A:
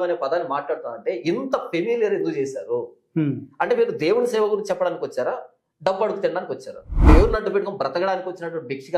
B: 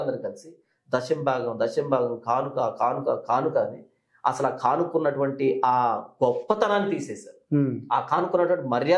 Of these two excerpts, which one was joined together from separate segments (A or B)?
A